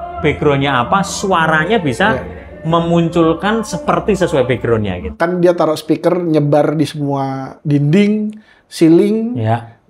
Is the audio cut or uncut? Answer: cut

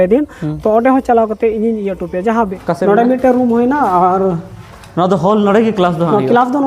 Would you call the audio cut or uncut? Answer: cut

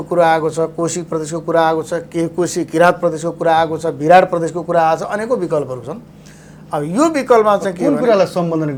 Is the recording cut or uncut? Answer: uncut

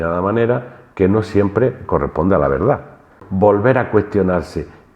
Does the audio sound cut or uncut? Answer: cut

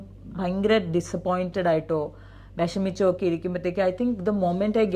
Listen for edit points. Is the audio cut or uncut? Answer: uncut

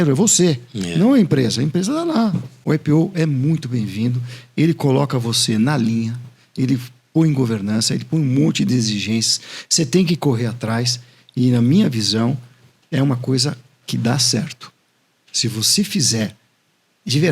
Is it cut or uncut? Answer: cut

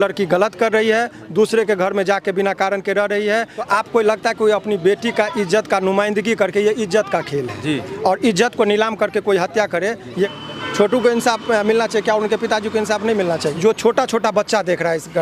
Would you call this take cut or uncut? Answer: cut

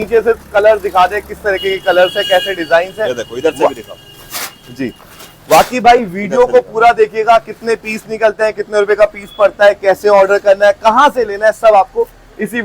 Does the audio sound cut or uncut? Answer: uncut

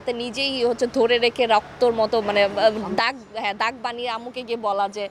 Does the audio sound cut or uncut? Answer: uncut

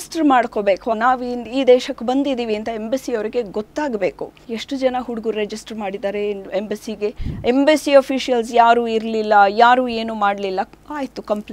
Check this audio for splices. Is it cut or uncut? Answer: cut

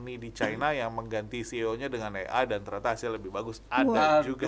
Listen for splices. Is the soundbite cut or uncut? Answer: uncut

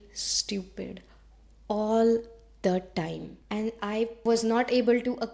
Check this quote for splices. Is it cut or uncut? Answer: uncut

